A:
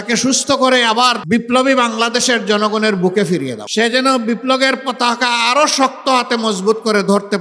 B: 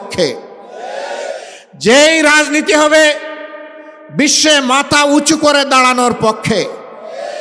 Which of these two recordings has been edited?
A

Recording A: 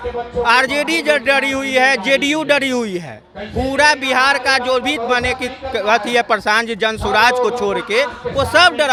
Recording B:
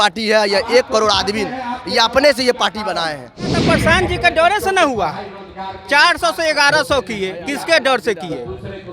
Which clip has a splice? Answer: B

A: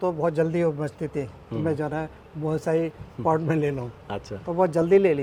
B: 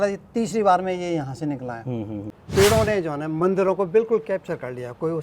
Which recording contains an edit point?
B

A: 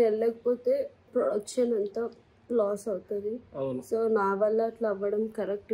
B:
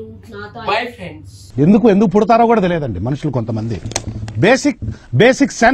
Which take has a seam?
A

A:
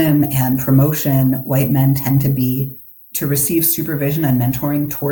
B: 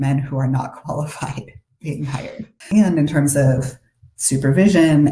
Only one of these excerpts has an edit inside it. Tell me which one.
B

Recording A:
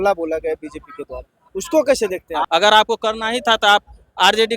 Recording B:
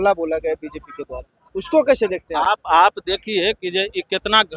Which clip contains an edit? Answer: A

